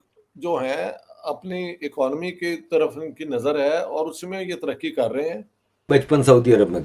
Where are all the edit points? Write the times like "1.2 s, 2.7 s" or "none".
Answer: 5.9 s